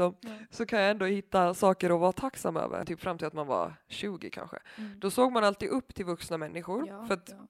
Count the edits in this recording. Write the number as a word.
one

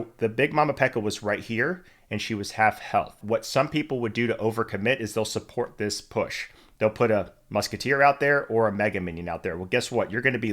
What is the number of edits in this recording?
one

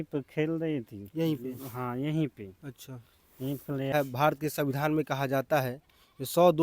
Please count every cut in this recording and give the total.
one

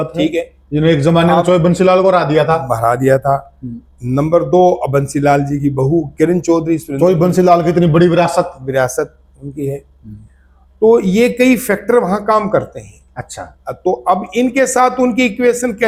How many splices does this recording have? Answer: zero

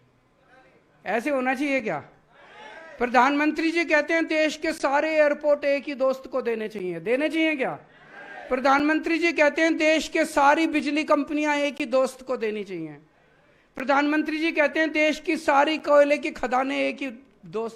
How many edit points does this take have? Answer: zero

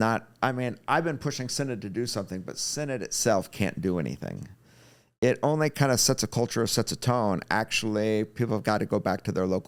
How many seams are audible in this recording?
zero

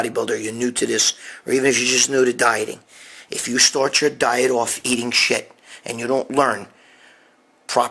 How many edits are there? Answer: zero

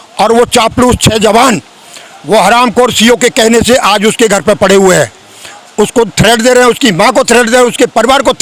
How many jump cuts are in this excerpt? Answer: zero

